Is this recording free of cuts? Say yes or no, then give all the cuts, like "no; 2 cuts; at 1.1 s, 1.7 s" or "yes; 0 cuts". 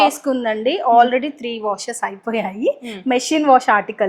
yes; 0 cuts